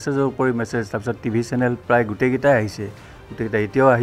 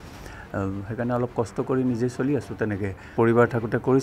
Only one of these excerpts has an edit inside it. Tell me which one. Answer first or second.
second